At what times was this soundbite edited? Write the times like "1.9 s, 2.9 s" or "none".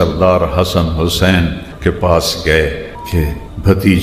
3.1 s